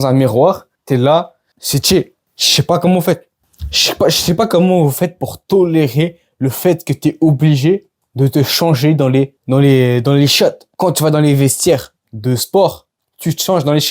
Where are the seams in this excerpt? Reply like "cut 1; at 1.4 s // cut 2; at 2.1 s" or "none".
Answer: none